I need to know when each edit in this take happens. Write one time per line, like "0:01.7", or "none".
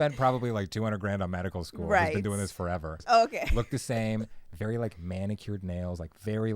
0:03.0